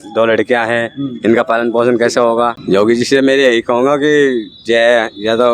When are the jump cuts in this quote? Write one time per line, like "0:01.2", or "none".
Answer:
0:02.6